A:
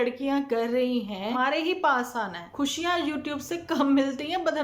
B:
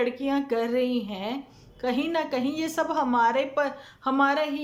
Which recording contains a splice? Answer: A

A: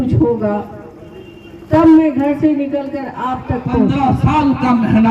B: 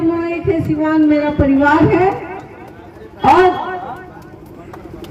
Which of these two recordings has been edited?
A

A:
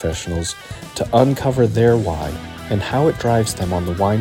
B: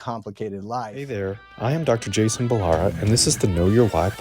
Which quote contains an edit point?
B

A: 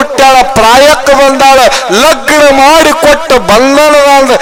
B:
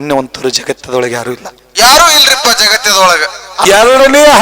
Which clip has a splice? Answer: B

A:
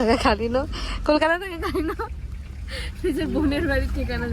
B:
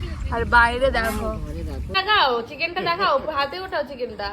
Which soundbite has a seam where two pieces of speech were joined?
B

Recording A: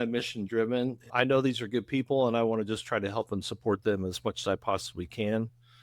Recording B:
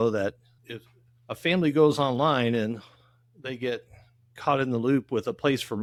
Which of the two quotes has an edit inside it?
A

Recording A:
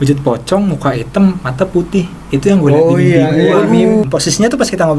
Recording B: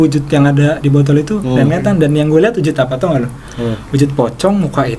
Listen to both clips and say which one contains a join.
A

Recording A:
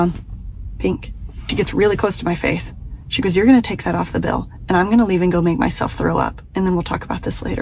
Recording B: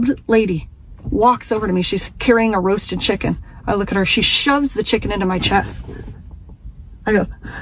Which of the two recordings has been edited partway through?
A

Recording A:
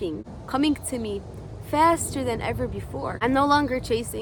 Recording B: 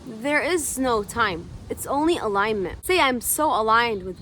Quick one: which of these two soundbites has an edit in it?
B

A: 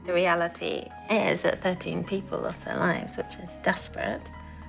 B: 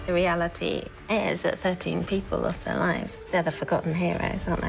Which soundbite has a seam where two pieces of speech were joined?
B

